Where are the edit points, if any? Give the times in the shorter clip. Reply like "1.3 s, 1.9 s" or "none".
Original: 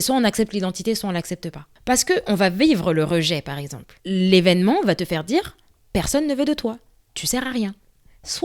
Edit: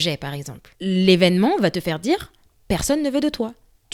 none